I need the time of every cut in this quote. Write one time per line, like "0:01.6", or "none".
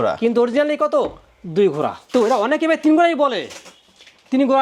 0:02.1